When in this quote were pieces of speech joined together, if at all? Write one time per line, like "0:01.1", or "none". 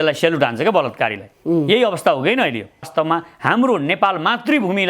0:02.9